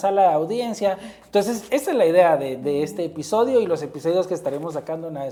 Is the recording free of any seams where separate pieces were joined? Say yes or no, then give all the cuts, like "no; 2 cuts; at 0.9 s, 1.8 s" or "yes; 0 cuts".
yes; 0 cuts